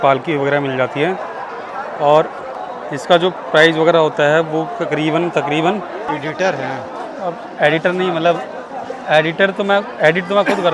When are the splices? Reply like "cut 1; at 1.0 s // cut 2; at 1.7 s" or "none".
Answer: cut 1; at 2.6 s // cut 2; at 6.0 s

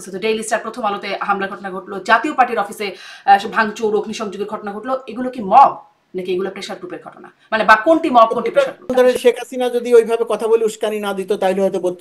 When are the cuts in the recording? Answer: cut 1; at 8.9 s

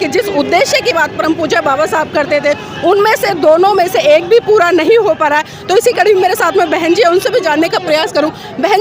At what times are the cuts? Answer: none

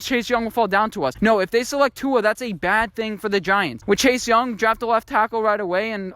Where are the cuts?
cut 1; at 1.1 s // cut 2; at 3.8 s

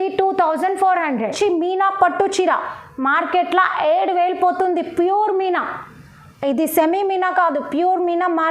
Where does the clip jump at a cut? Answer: cut 1; at 1.3 s

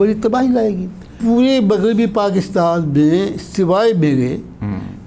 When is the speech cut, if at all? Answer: cut 1; at 1.2 s

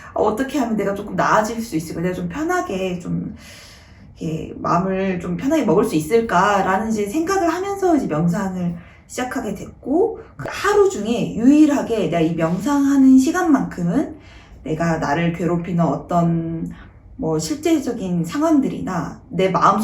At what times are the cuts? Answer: cut 1; at 10.4 s

